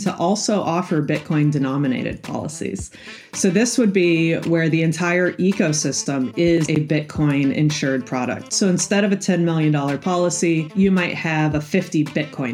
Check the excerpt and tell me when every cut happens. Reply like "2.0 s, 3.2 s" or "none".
10.7 s

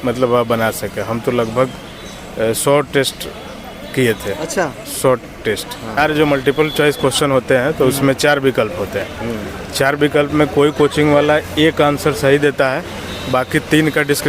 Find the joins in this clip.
6.0 s

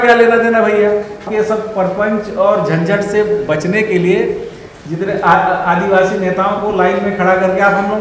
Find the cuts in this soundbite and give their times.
1.3 s

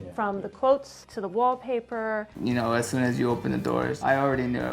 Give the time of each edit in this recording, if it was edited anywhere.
2.3 s

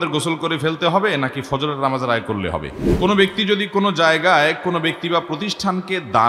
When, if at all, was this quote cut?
2.8 s

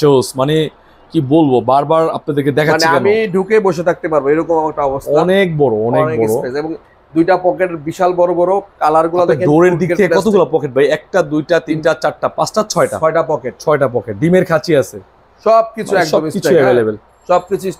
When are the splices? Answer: none

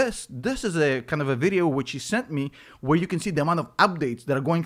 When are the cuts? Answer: none

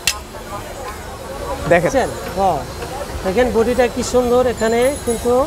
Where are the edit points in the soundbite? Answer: none

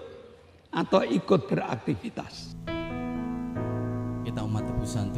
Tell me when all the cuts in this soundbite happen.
2.5 s

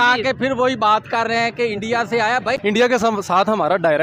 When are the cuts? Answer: 2.6 s

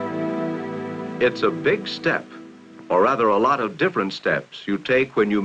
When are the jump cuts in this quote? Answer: 3.9 s

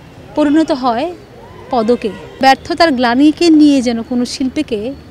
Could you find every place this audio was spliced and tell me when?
2.4 s

